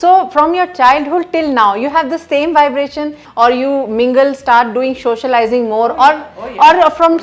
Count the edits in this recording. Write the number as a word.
one